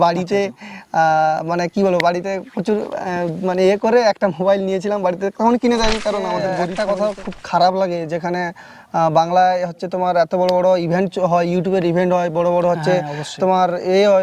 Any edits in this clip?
yes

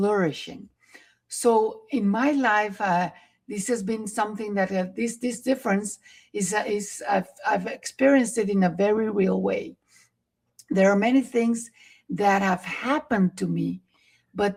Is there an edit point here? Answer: no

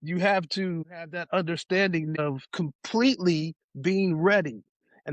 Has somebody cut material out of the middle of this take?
yes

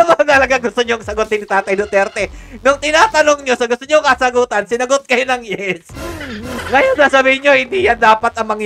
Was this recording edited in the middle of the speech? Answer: no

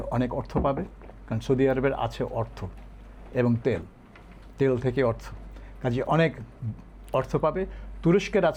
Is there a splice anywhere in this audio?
no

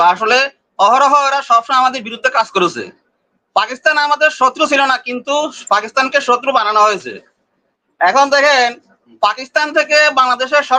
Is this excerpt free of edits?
yes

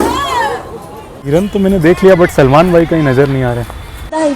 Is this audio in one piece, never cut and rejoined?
no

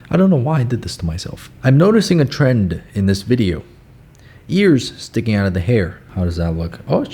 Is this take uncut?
no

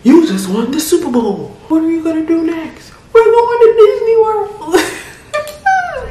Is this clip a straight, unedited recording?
yes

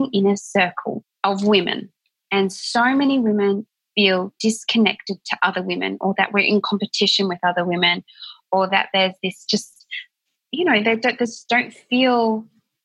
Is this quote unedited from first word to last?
yes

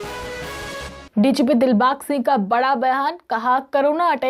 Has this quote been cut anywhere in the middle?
no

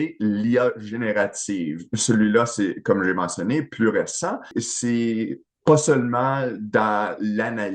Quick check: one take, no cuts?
no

